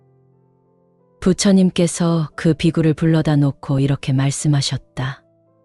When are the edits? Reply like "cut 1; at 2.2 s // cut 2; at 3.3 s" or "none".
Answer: none